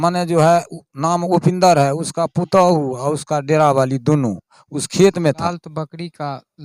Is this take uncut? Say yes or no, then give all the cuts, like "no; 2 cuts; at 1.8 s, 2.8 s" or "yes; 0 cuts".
no; 1 cut; at 5.5 s